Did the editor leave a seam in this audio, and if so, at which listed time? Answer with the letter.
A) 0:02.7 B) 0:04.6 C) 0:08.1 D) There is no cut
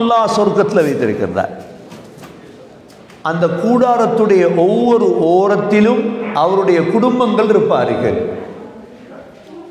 A